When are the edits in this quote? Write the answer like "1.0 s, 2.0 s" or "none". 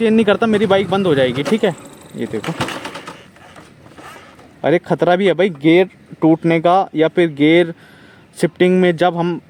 none